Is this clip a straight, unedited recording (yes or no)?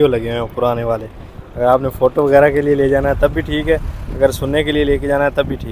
yes